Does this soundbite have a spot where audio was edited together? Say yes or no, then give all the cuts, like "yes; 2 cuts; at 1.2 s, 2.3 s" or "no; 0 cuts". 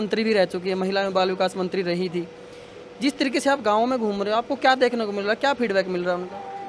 no; 0 cuts